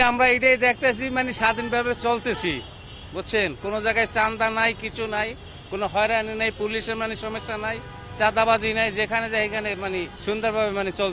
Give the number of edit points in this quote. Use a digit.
1